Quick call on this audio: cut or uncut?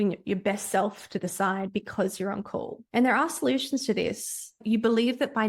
cut